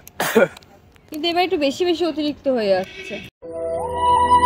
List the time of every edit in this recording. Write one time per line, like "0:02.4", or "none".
none